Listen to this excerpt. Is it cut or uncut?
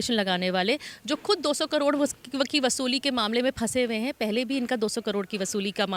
uncut